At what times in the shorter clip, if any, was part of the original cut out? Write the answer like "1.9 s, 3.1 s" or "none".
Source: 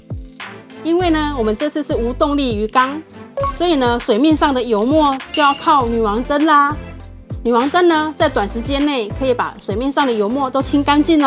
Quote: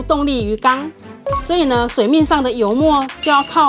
none